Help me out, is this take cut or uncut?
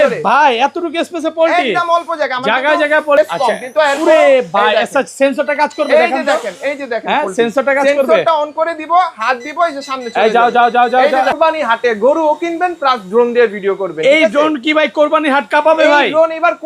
cut